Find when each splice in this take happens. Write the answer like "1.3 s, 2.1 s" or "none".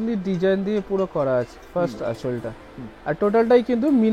none